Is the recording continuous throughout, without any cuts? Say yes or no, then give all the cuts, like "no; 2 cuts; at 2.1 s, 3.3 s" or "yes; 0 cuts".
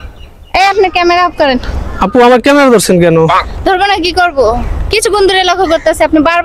yes; 0 cuts